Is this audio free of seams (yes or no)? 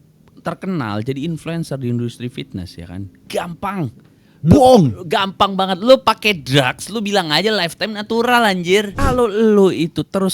no